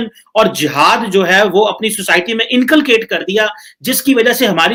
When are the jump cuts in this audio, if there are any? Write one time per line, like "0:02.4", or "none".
none